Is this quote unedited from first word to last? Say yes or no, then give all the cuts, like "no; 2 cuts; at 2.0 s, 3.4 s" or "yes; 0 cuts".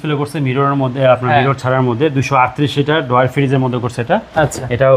yes; 0 cuts